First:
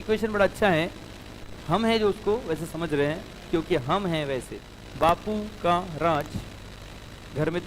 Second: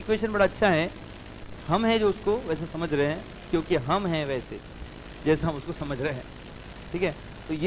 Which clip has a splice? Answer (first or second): first